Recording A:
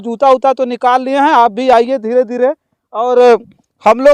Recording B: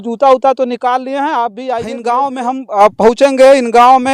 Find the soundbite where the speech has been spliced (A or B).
B